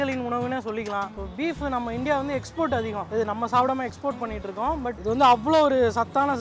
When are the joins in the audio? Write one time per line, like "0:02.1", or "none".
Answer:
0:01.1